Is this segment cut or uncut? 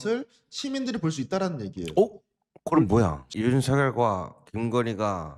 cut